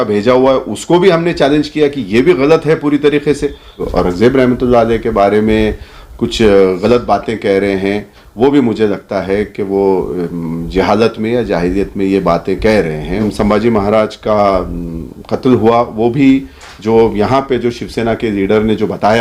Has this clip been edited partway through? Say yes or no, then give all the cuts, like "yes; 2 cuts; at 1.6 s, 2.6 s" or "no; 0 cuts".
yes; 2 cuts; at 3.8 s, 13.2 s